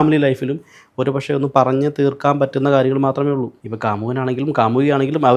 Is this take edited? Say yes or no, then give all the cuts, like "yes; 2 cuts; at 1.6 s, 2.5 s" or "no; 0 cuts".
yes; 1 cut; at 3.6 s